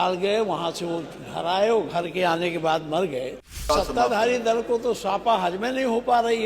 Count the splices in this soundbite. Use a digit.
1